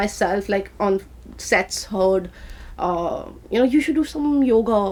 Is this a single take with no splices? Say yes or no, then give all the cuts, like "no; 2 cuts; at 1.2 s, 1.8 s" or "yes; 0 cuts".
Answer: yes; 0 cuts